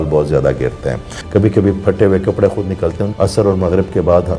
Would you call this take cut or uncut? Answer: cut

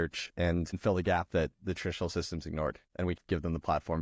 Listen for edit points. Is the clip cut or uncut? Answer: cut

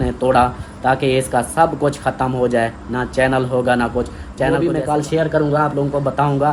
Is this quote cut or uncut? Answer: cut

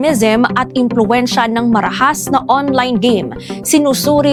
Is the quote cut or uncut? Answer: uncut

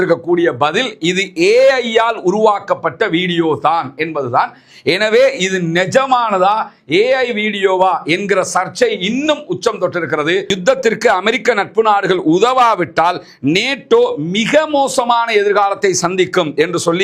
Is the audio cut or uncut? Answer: cut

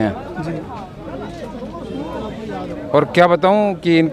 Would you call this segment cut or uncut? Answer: uncut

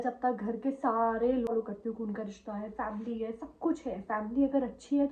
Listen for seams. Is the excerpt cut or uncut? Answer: cut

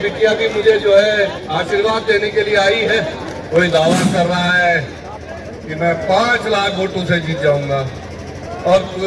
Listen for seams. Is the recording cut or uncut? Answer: cut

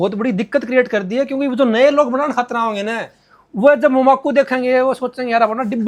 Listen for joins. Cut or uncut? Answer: uncut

